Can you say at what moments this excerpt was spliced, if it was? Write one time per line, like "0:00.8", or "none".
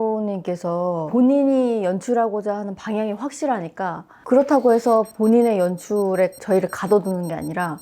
0:01.0